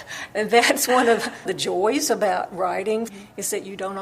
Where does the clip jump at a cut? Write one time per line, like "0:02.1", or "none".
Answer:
0:01.5
0:03.1